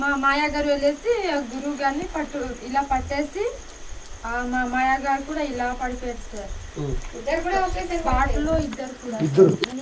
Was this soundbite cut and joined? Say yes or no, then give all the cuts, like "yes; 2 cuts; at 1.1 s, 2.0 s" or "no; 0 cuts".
no; 0 cuts